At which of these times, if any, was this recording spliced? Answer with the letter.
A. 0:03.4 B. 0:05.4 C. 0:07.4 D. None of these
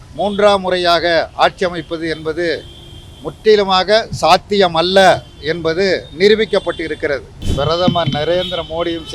C